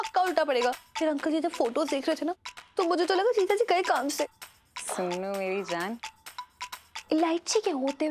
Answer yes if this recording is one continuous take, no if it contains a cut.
yes